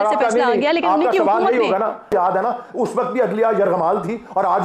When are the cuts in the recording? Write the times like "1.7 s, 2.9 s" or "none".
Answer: 2.1 s